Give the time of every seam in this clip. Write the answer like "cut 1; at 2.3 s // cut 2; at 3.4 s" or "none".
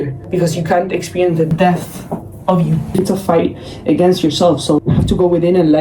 cut 1; at 3.0 s // cut 2; at 4.8 s